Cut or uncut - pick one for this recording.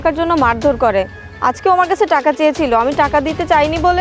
uncut